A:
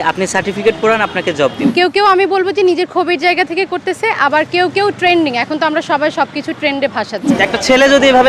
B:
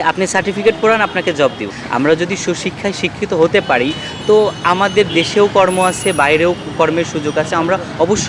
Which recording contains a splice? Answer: A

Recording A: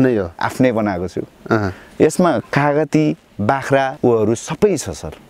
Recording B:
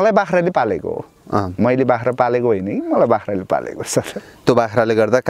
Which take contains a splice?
A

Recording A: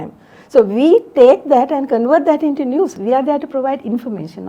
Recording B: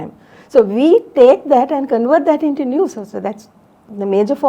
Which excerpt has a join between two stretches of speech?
A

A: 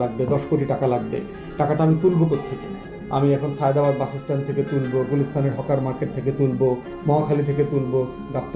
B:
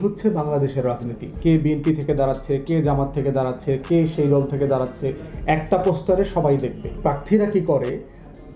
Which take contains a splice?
B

